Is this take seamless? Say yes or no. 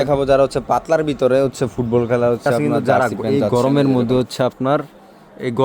no